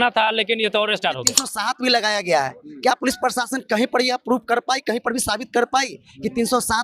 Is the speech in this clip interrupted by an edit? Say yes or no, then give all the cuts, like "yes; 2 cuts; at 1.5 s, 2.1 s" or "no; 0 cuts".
yes; 1 cut; at 1.5 s